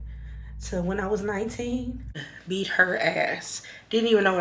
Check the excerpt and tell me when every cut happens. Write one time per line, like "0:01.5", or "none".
0:02.2